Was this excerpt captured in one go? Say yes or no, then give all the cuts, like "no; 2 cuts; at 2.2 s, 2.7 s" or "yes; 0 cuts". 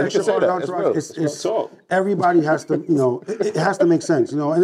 yes; 0 cuts